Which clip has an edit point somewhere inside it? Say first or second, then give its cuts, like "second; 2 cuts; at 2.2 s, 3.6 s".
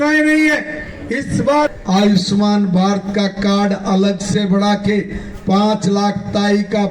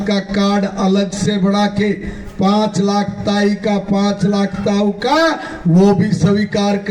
first; 1 cut; at 1.7 s